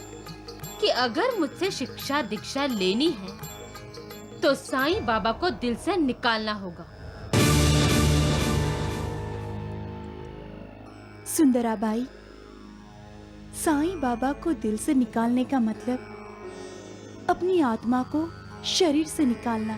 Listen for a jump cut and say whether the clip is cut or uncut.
uncut